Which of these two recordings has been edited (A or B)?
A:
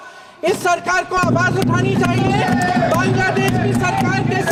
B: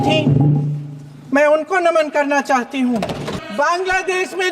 B